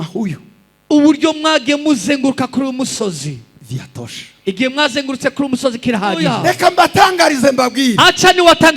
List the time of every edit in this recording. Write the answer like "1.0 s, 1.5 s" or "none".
6.4 s